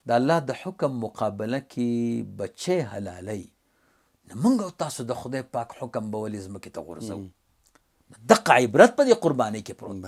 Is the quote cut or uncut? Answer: uncut